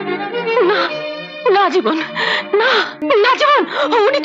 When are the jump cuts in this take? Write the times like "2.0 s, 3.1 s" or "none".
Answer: 3.0 s